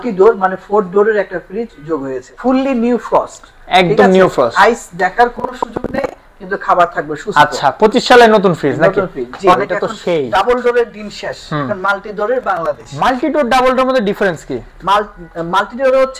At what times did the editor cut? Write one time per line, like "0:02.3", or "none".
0:02.3
0:09.5